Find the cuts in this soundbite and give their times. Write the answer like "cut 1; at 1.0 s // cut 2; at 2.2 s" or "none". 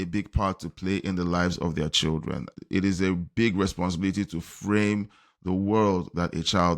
cut 1; at 2.5 s

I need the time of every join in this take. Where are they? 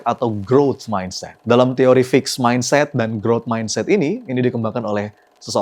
none

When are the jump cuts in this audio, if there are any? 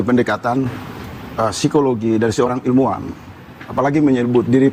none

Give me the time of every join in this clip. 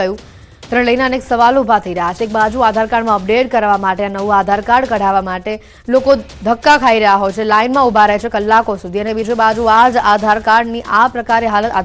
none

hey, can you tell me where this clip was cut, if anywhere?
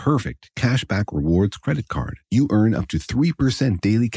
none

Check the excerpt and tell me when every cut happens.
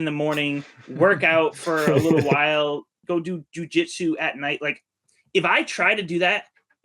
cut 1; at 3.0 s

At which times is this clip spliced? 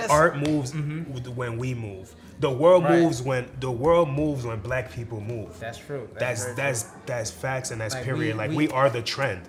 none

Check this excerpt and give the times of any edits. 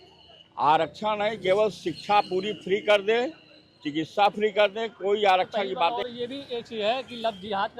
cut 1; at 6.0 s

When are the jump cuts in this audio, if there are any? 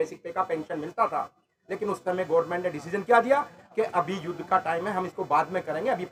none

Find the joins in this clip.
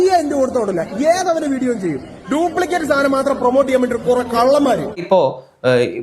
cut 1; at 5.0 s

